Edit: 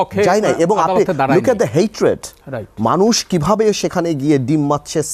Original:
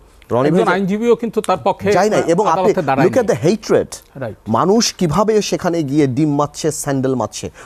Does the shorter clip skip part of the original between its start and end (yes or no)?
no